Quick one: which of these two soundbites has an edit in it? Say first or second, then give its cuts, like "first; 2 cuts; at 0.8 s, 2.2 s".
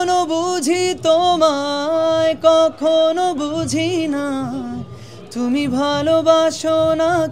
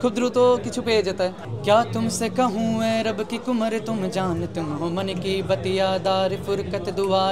second; 1 cut; at 1.5 s